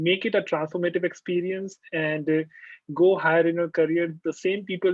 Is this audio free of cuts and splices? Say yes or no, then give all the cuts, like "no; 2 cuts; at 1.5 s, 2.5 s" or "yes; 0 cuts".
yes; 0 cuts